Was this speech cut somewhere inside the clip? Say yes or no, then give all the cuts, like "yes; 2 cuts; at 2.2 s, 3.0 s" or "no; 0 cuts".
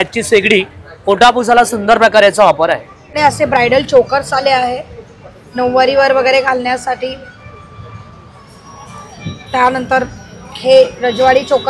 yes; 1 cut; at 3.1 s